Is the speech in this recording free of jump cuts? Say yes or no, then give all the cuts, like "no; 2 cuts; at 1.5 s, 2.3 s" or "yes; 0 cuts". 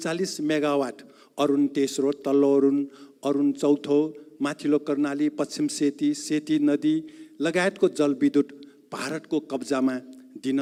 yes; 0 cuts